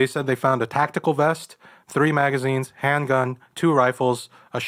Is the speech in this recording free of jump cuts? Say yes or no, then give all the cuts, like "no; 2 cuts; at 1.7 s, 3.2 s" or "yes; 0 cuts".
yes; 0 cuts